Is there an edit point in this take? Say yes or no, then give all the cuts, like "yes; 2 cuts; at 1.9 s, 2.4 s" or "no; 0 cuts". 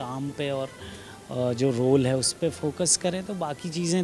no; 0 cuts